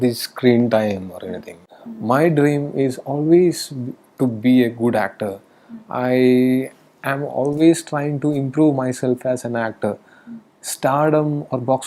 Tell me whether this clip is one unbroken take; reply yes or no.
no